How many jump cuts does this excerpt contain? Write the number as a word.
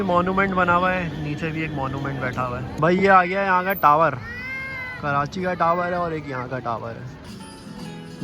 two